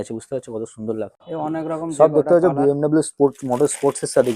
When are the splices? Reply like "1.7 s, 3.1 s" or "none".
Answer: 1.2 s